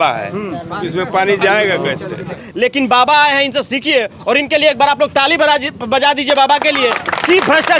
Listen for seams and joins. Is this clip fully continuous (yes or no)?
no